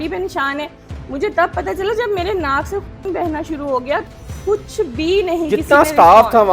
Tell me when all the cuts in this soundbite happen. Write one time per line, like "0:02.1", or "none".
0:04.0